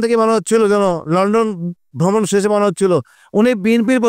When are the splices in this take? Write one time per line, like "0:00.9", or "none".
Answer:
0:03.2